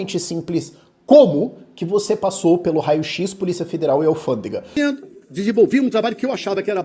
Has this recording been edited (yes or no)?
yes